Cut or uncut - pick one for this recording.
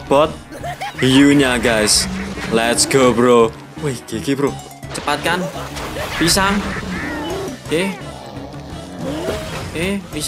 uncut